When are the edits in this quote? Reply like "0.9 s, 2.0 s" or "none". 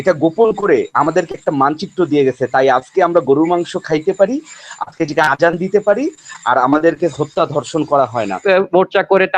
8.4 s